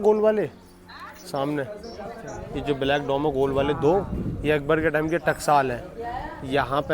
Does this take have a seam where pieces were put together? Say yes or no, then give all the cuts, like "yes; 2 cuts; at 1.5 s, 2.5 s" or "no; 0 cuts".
no; 0 cuts